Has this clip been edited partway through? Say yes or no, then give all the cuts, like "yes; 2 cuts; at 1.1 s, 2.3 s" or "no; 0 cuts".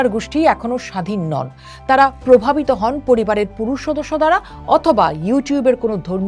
no; 0 cuts